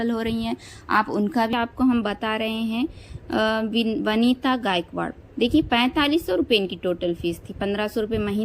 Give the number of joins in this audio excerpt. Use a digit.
1